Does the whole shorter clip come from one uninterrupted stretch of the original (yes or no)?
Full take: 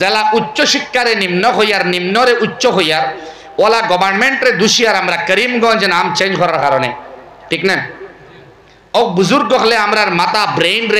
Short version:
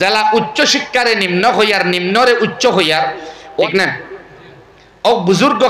no